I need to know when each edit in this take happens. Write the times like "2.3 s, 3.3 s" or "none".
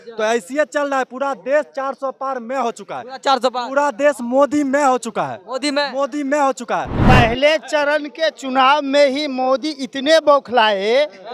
6.9 s